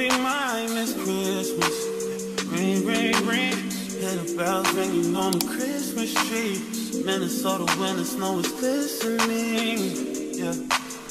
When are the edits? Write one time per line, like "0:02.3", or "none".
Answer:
none